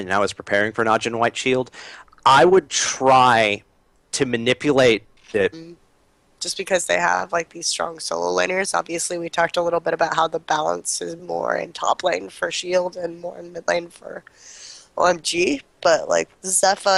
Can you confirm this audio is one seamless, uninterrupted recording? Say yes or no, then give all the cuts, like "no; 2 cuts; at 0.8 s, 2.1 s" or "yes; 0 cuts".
yes; 0 cuts